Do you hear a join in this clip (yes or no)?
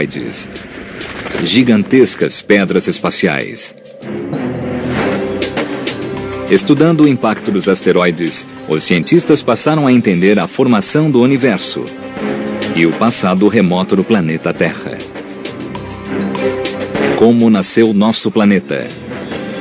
no